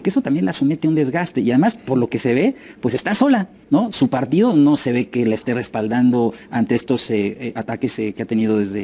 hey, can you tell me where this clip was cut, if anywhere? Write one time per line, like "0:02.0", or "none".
none